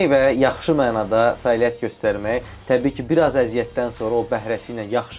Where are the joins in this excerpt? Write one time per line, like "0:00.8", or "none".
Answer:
none